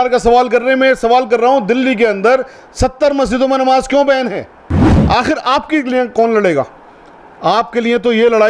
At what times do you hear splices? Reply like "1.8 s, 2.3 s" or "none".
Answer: 5.0 s